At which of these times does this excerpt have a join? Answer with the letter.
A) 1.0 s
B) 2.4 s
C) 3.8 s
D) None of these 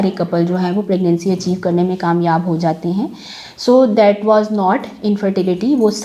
D